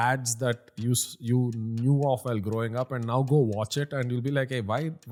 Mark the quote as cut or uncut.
uncut